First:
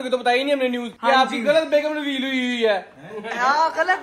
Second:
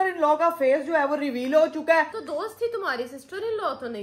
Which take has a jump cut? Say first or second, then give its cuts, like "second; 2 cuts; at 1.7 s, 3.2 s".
second; 1 cut; at 2.1 s